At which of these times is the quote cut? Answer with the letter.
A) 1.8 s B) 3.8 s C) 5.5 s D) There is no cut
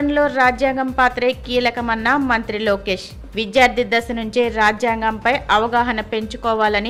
D